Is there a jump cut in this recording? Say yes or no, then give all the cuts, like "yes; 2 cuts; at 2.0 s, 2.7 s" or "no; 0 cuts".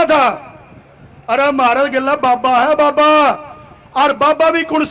no; 0 cuts